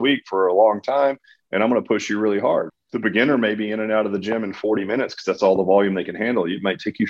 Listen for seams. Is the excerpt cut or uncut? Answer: cut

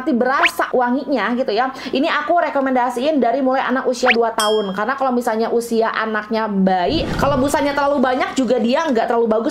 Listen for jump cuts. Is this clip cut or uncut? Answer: cut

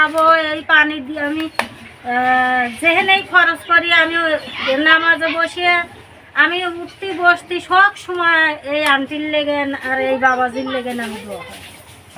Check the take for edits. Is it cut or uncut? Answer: uncut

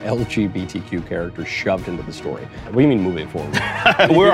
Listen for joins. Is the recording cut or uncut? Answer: cut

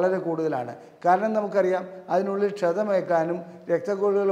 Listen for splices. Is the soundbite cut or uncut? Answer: uncut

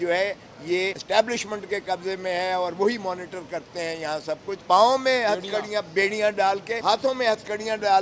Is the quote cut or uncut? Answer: cut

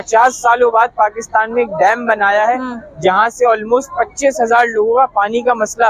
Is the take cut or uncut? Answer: uncut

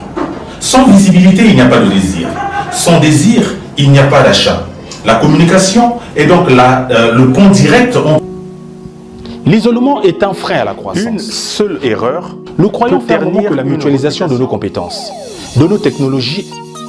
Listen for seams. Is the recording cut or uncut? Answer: cut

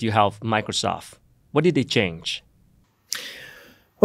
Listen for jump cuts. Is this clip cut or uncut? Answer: uncut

